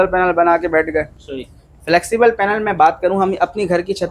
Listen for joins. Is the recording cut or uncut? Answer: cut